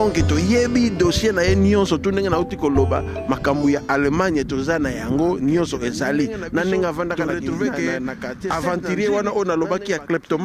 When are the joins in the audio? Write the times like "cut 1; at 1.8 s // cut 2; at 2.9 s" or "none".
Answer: cut 1; at 8.5 s